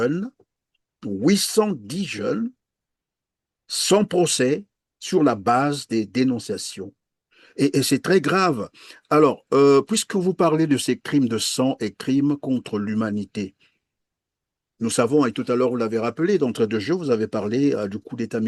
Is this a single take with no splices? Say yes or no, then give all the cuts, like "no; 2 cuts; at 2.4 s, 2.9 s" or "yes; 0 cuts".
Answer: yes; 0 cuts